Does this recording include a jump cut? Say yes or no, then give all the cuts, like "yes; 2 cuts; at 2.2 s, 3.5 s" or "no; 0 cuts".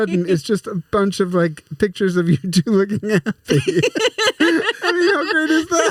no; 0 cuts